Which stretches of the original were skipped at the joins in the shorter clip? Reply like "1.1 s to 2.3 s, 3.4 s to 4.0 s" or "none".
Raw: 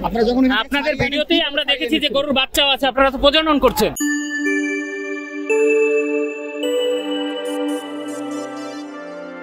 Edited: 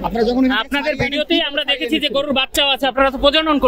none